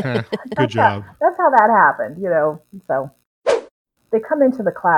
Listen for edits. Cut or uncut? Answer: cut